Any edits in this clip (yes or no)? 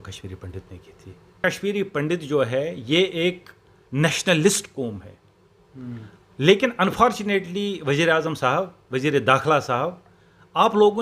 yes